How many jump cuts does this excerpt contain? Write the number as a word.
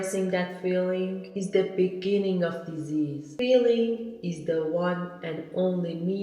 one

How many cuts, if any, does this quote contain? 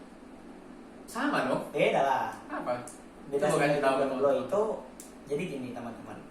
one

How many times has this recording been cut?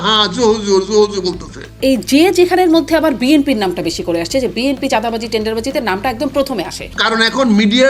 two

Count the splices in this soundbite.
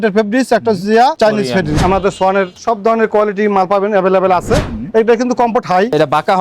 two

